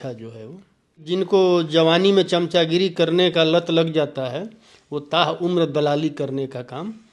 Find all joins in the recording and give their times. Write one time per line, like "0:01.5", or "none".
0:01.0